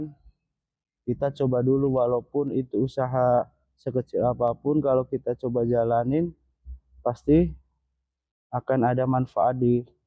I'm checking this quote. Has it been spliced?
no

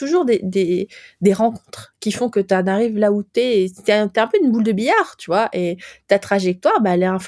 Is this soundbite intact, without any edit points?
yes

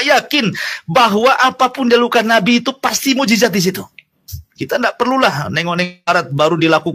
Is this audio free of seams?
yes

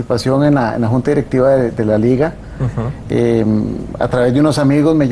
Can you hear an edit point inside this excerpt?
yes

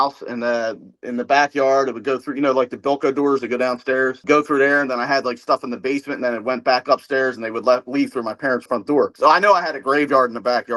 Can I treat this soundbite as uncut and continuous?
yes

